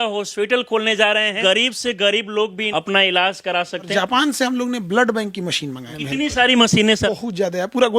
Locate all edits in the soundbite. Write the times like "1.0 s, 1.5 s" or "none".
1.4 s, 2.6 s, 3.9 s, 5.9 s, 7.0 s

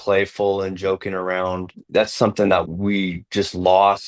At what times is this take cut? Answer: 2.7 s

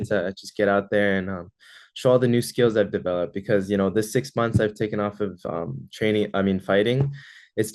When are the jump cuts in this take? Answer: none

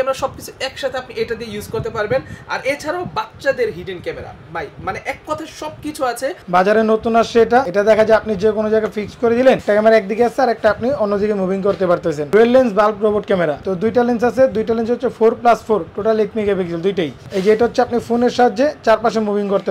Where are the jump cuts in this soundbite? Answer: 6.4 s, 7.7 s, 9.6 s, 12.3 s, 13.6 s, 17.3 s

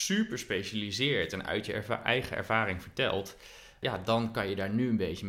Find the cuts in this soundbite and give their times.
none

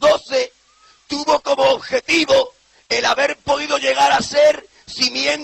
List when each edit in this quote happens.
2.4 s

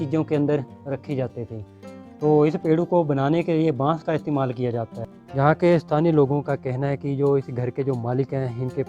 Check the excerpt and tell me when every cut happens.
5.2 s

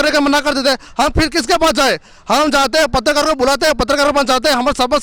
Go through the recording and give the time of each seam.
none

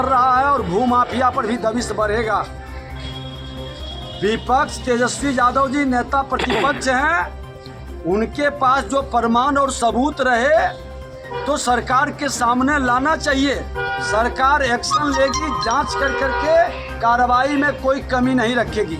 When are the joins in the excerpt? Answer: 2.7 s, 4.2 s

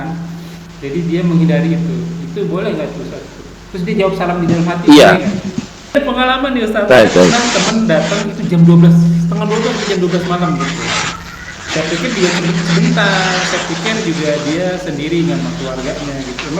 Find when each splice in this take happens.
5.9 s

